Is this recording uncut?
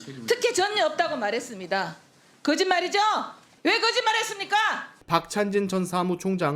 no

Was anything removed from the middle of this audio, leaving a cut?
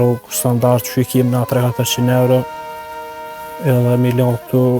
no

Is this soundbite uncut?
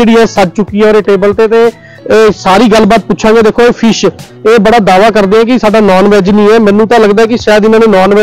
yes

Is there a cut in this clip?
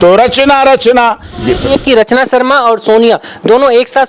yes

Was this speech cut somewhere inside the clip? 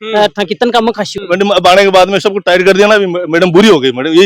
yes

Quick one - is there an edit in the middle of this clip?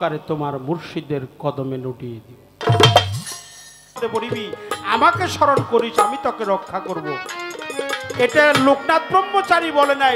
yes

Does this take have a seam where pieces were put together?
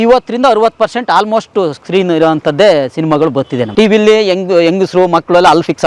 yes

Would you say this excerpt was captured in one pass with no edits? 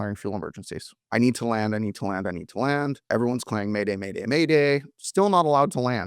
no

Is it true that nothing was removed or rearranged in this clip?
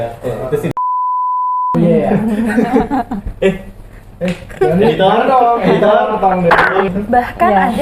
no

